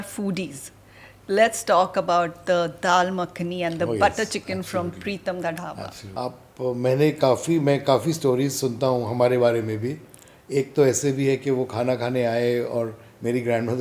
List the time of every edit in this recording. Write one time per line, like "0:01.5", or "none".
0:06.0